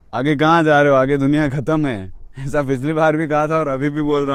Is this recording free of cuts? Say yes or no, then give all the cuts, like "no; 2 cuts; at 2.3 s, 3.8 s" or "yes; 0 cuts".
yes; 0 cuts